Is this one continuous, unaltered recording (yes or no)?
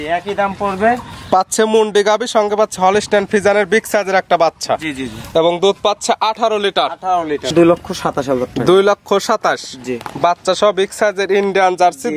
no